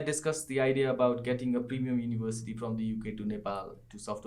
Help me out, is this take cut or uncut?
uncut